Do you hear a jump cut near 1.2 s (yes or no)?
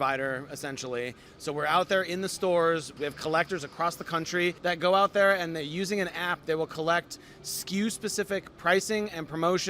yes